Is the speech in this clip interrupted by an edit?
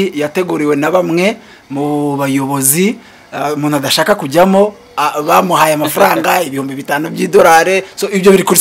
no; 0 cuts

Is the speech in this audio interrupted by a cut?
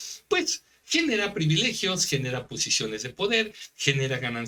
no; 0 cuts

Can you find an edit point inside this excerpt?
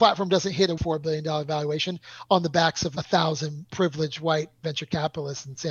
yes; 3 cuts; at 0.8 s, 2.9 s, 3.6 s

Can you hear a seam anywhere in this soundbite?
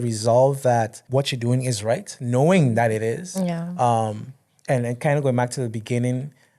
yes; 1 cut; at 1.0 s

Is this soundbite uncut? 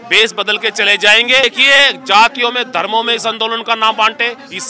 no; 1 cut; at 1.4 s

